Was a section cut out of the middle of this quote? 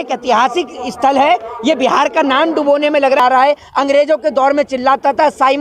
yes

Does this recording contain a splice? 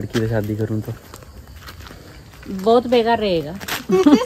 no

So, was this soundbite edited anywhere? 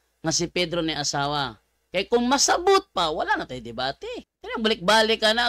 yes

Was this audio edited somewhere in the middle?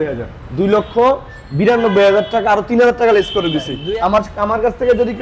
yes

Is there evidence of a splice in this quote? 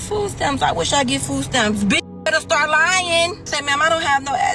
yes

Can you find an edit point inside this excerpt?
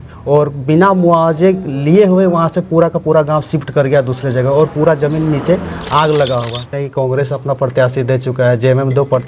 yes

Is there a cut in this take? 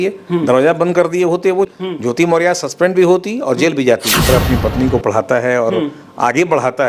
yes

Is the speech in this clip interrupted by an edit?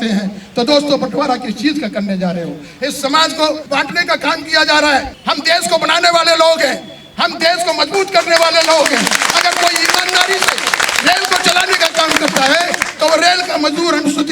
yes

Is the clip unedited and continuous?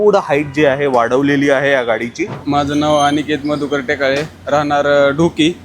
no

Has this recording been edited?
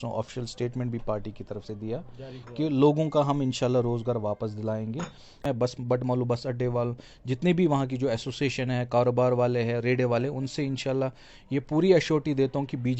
yes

